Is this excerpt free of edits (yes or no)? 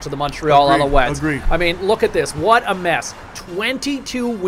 no